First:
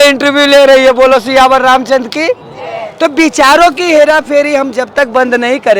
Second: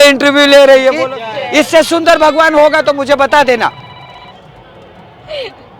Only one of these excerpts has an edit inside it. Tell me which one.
second; 1 cut; at 1.0 s

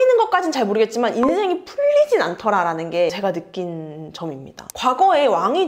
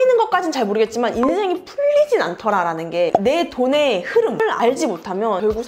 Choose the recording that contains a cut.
second; 2 cuts; at 3.1 s, 4.4 s

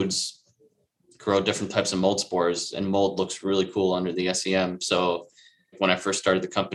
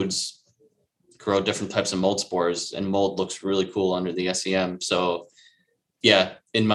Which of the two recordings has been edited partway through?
first; 1 cut; at 5.8 s

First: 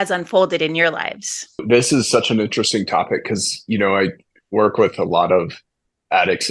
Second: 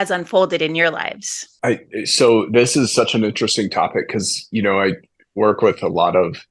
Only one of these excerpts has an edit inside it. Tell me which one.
first; 1 cut; at 1.6 s

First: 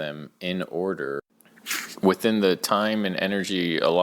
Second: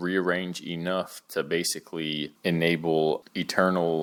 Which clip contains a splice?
first; 1 cut; at 1.3 s

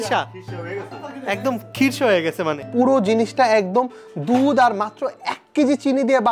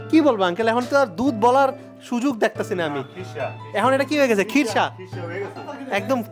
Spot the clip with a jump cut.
first; 1 cut; at 2.6 s

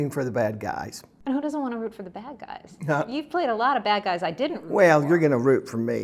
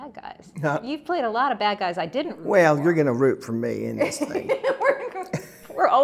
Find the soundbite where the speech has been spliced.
first; 1 cut; at 1.0 s

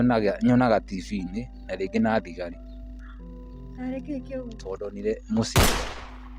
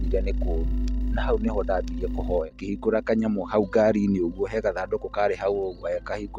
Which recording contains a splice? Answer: second; 1 cut; at 2.5 s

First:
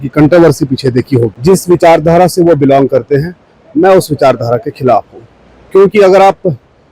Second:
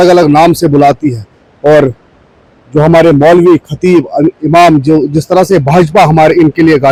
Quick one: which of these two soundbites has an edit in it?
first; 1 cut; at 1.3 s

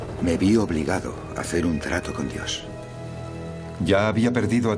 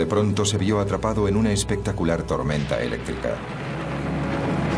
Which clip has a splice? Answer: first; 1 cut; at 3.7 s

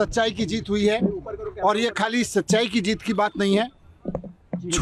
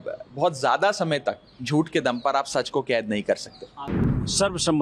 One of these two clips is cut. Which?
second; 1 cut; at 3.7 s

